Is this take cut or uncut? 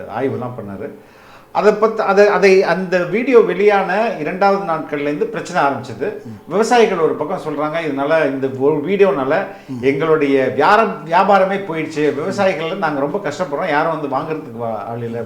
uncut